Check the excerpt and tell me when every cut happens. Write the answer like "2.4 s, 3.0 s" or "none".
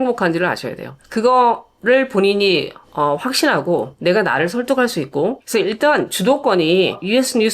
5.4 s